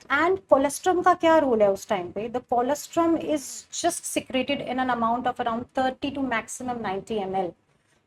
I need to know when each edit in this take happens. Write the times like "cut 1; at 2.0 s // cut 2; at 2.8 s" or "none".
none